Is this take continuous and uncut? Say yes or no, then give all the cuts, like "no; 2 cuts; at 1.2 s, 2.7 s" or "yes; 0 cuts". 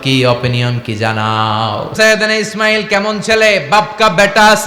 no; 1 cut; at 1.9 s